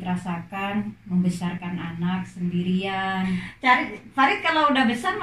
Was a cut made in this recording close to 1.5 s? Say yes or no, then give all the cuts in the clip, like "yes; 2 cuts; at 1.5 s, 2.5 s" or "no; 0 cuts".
no; 1 cut; at 3.5 s